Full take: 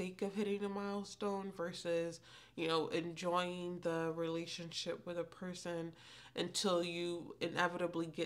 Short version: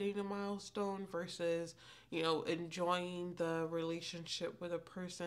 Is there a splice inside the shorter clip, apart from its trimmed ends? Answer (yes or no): no